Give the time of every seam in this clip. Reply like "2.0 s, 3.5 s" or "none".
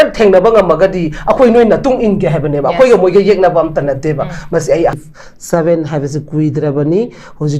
4.9 s